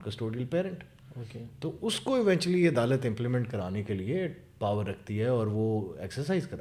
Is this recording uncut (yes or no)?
yes